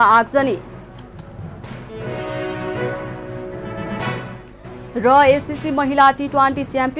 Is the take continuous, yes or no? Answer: no